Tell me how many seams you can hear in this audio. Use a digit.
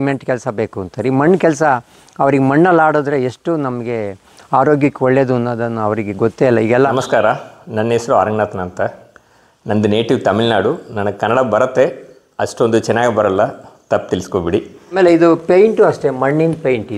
2